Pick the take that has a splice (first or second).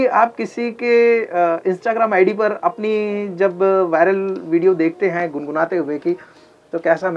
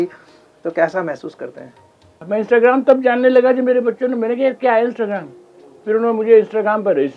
second